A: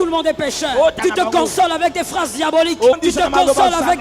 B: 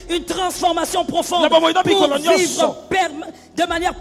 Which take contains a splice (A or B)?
A